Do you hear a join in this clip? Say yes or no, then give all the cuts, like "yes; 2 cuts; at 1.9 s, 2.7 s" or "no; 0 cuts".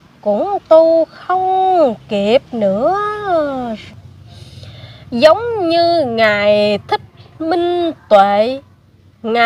yes; 1 cut; at 3.8 s